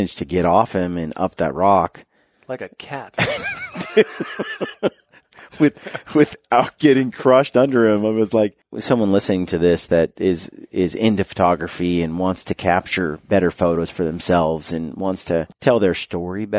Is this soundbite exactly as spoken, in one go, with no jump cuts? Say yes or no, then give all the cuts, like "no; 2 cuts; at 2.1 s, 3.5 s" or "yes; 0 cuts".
no; 2 cuts; at 8.7 s, 15.5 s